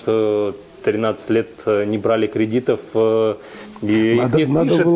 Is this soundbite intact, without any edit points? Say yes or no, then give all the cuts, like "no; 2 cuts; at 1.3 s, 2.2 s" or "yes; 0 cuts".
yes; 0 cuts